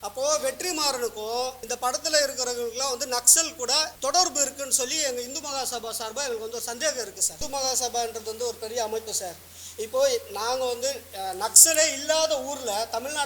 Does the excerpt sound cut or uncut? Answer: cut